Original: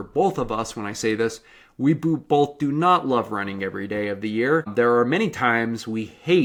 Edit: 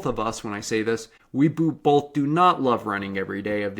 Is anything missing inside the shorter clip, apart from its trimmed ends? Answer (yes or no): yes